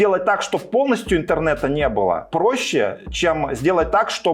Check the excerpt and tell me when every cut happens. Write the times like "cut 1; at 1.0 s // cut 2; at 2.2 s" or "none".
none